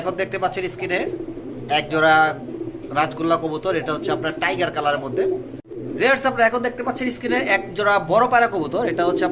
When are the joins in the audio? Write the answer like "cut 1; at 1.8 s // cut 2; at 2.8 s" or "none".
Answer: cut 1; at 6.1 s